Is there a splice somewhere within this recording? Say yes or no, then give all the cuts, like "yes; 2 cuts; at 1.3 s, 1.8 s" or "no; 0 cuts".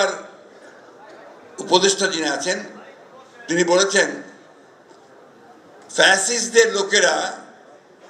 no; 0 cuts